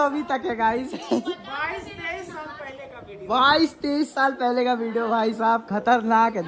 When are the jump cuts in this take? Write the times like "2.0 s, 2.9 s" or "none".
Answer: none